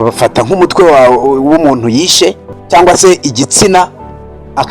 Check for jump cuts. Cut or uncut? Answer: cut